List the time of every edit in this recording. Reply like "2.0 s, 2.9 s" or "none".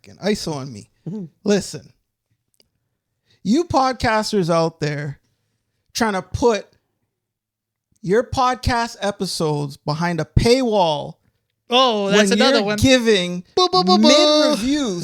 none